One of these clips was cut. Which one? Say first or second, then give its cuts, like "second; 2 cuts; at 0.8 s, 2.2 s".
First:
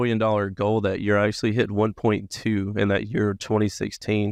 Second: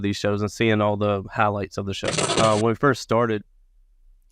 second; 1 cut; at 2.2 s